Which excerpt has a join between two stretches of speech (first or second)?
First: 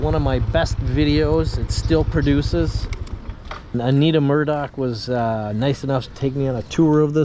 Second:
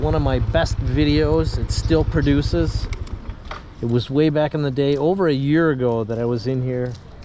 first